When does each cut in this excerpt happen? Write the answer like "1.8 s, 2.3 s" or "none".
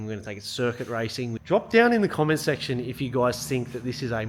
1.4 s